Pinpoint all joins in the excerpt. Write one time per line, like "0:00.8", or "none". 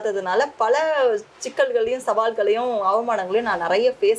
none